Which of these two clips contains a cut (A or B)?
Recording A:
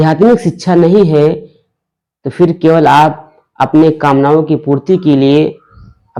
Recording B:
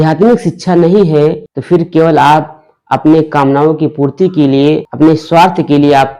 B